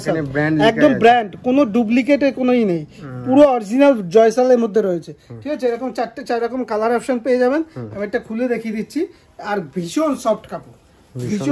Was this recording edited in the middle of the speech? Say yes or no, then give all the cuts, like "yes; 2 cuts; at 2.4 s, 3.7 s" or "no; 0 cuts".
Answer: no; 0 cuts